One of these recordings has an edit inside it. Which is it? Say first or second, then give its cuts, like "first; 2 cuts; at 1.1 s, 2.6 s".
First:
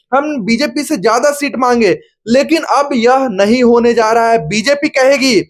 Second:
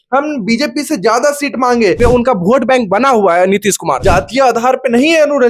second; 2 cuts; at 2.0 s, 4.0 s